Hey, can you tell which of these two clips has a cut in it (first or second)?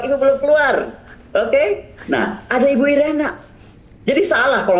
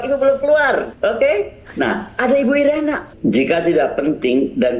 second